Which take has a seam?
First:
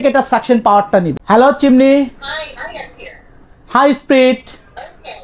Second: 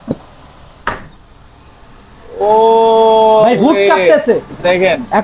first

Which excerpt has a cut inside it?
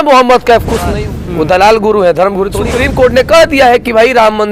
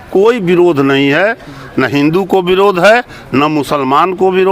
first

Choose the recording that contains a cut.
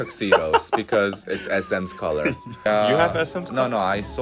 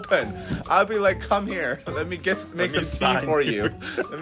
first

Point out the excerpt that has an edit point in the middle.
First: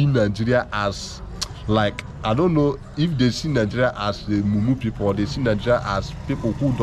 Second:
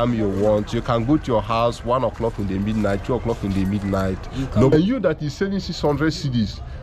second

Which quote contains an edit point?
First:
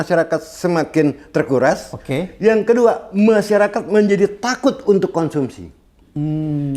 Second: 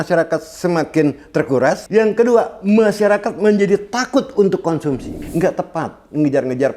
second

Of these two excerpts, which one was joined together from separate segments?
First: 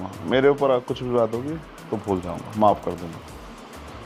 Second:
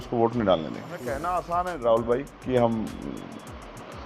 second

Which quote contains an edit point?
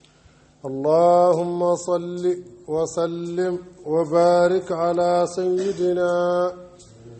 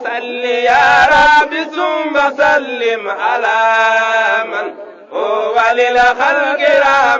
second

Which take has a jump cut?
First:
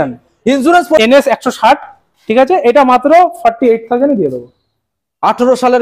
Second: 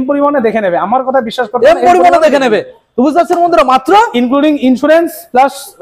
first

